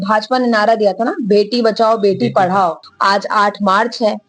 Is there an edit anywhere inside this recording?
yes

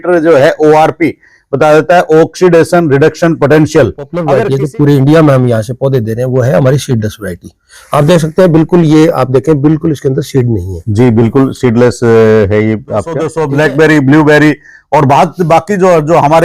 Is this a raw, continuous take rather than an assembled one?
no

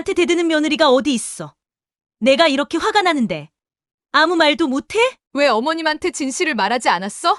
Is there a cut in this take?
yes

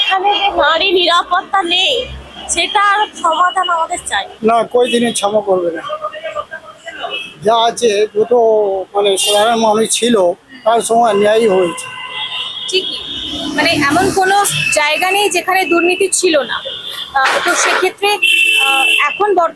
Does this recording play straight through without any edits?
no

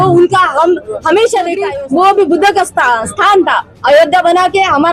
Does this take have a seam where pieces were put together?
yes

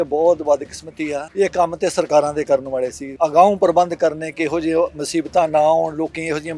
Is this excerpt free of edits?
no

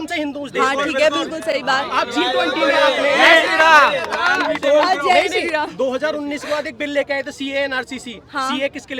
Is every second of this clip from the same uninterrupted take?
yes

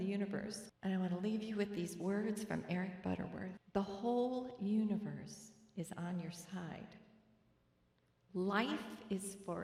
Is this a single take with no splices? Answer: yes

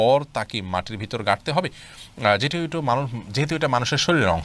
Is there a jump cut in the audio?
no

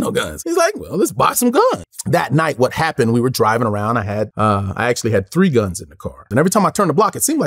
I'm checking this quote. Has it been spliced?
yes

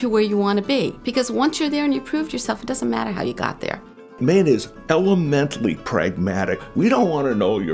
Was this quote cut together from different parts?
yes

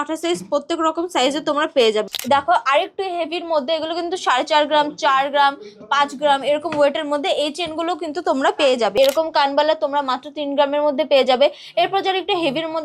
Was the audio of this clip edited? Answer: yes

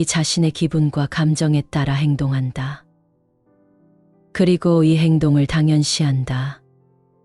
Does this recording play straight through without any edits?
no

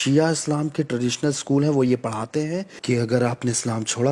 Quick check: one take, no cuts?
yes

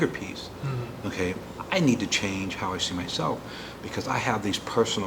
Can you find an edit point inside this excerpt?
no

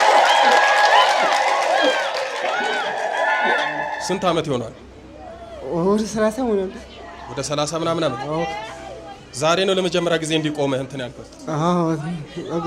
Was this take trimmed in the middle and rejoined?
yes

